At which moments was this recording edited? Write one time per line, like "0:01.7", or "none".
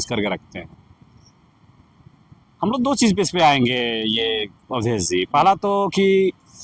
none

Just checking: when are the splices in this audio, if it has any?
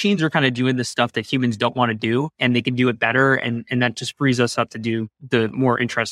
0:02.3
0:05.1

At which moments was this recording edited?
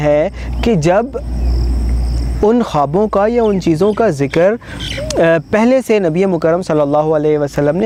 none

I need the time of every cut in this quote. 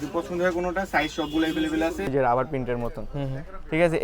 0:02.1

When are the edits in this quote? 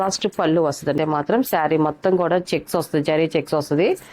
0:01.0

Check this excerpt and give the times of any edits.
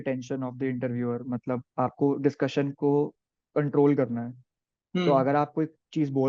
none

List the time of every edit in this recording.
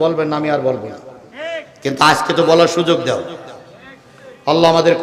none

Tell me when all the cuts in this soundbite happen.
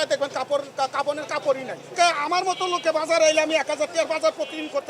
0:01.9

